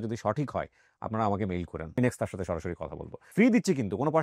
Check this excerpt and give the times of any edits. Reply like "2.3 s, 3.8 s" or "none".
2.0 s, 3.3 s